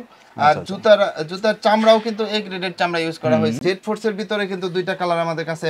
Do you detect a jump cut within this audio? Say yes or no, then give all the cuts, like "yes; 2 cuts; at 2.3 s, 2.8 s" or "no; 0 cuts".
yes; 1 cut; at 3.6 s